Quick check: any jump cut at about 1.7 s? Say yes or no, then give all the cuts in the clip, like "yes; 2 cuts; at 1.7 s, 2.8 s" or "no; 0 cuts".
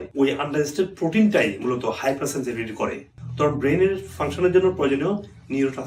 no; 1 cut; at 3.1 s